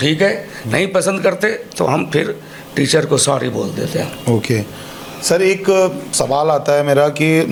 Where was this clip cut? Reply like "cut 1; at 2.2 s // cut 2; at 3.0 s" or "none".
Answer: none